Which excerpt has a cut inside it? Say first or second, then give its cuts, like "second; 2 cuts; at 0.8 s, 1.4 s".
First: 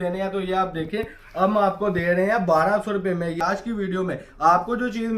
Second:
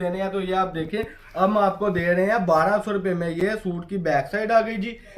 first; 1 cut; at 3.4 s